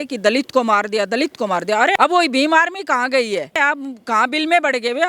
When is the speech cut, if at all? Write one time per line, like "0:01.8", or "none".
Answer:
0:02.0
0:03.6